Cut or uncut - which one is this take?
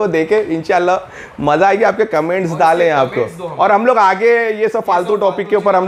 uncut